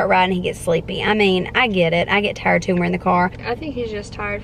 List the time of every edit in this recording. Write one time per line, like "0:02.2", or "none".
0:03.4